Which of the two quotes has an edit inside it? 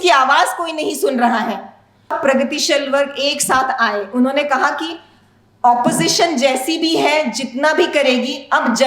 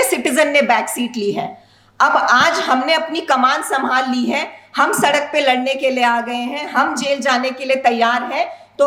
first; 1 cut; at 2.2 s

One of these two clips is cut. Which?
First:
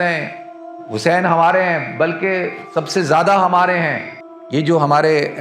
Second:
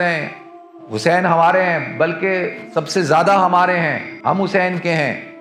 first; 1 cut; at 4.1 s

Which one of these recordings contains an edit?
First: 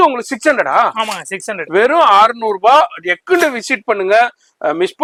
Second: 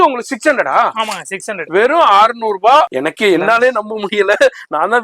second; 1 cut; at 2.9 s

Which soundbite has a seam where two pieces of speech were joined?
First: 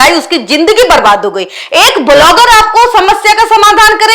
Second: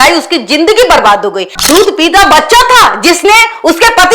second; 1 cut; at 1.6 s

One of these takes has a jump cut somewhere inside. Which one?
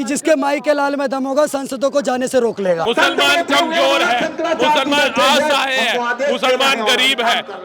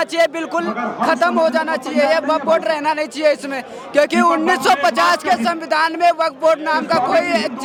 first; 1 cut; at 2.8 s

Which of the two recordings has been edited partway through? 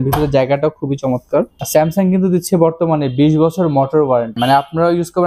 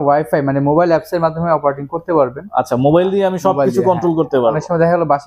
first; 2 cuts; at 1.6 s, 4.4 s

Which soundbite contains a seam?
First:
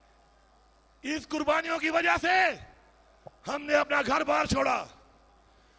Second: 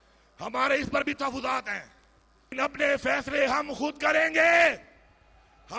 second; 1 cut; at 2.5 s

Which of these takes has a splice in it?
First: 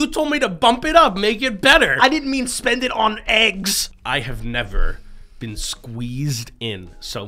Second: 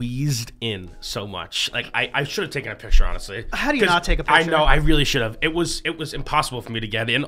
first; 1 cut; at 3.9 s

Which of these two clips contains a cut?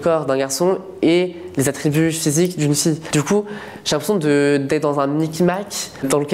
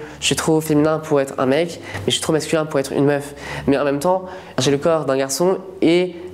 first; 1 cut; at 3.0 s

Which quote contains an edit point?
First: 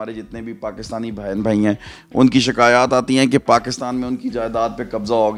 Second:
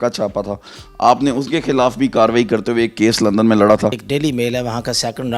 second; 1 cut; at 4.0 s

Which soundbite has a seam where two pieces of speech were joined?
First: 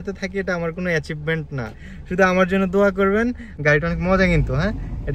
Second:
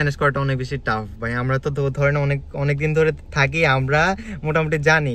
first; 1 cut; at 3.5 s

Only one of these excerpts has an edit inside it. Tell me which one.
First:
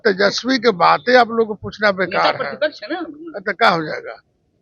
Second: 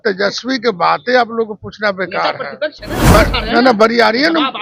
second; 1 cut; at 3.1 s

